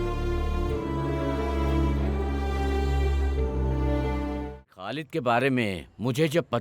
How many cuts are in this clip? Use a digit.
1